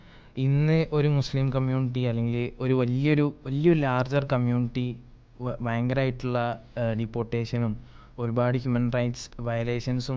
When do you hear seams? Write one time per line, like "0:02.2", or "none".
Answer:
none